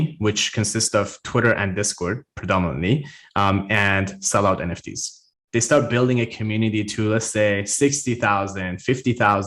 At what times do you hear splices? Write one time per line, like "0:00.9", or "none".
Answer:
0:05.4